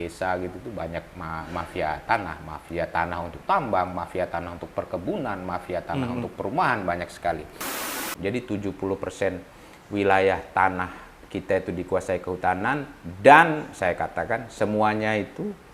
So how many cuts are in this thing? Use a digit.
1